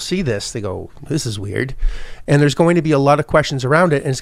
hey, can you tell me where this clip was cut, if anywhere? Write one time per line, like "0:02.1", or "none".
0:01.0